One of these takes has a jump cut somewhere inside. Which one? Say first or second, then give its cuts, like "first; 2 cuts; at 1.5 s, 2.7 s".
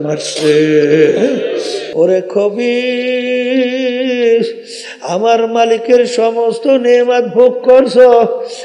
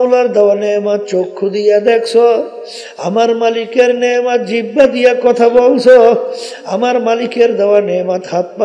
first; 1 cut; at 1.8 s